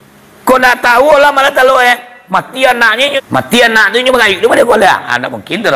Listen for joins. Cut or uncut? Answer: cut